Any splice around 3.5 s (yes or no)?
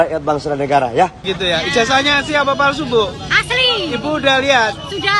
no